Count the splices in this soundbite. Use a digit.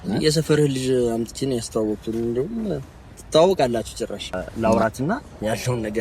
1